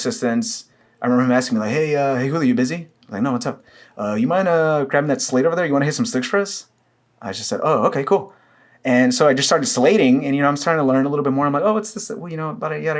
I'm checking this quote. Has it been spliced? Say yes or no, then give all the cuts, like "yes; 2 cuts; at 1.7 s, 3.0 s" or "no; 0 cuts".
no; 0 cuts